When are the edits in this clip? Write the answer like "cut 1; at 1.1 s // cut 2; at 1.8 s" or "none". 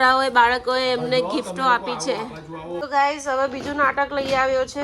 cut 1; at 2.8 s